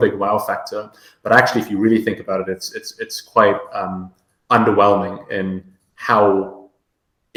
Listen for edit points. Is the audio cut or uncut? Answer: uncut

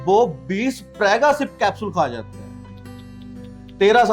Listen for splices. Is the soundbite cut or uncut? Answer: uncut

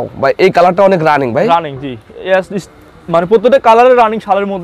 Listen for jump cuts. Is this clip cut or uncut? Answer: uncut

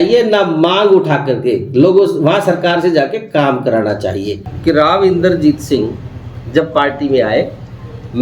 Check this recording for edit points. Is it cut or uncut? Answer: cut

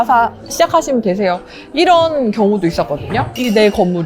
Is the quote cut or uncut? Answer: uncut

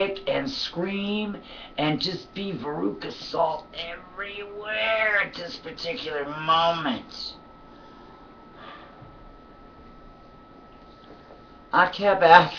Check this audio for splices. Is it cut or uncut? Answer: cut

